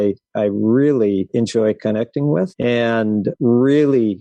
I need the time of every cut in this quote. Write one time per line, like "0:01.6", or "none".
0:01.3
0:02.8